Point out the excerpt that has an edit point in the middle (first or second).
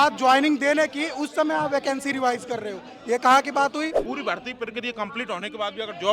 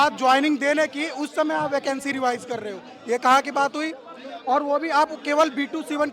first